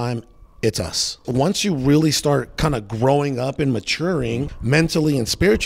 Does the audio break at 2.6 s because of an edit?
no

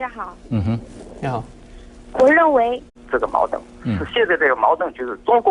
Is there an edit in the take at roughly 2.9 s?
no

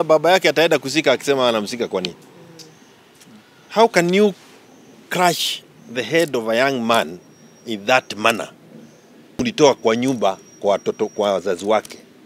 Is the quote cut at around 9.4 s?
yes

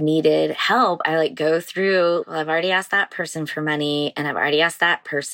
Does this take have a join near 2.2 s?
yes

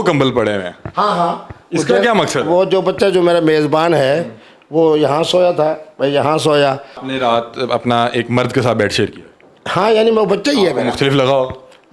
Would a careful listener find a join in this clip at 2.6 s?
no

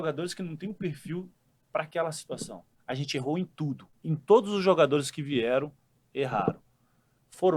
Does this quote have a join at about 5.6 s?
no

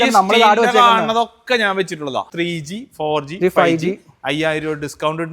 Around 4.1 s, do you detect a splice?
no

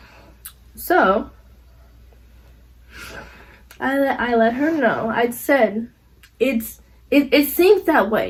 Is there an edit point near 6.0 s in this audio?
no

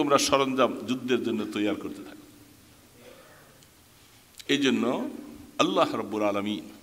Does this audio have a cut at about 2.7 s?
no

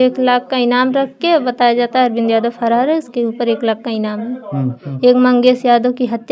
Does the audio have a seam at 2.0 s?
no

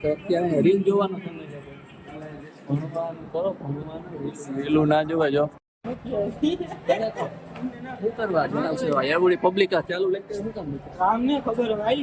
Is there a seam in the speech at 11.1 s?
no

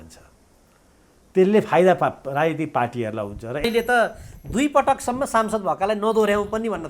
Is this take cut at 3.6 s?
yes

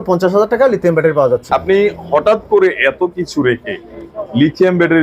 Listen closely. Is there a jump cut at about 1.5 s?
yes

